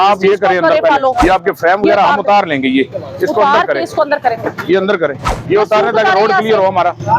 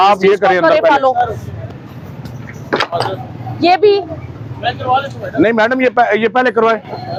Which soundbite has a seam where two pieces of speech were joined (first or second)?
first